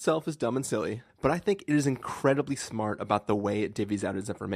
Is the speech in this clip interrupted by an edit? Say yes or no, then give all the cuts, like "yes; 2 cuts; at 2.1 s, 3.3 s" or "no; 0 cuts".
yes; 1 cut; at 1.1 s